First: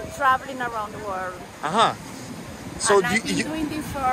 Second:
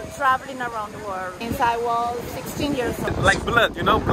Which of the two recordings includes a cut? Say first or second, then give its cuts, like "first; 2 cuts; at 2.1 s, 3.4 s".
second; 2 cuts; at 1.4 s, 3.1 s